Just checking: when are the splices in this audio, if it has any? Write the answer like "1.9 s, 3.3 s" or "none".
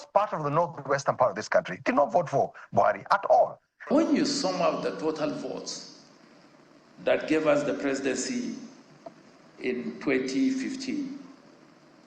3.9 s